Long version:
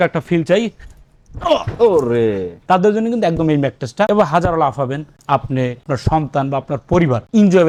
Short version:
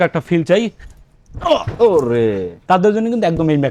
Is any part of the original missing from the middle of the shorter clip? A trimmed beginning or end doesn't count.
no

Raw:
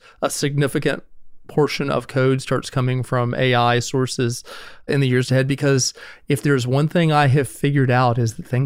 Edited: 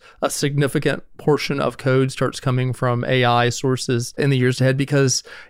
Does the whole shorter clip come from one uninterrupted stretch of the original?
no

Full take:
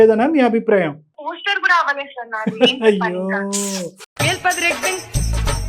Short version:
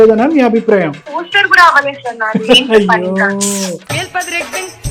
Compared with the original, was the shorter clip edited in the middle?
yes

